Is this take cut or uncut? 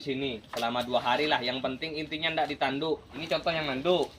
cut